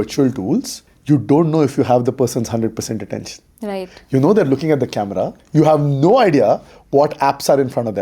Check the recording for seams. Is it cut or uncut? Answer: uncut